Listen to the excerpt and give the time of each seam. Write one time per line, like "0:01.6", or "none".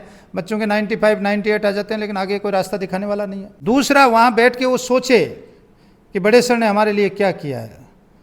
0:03.5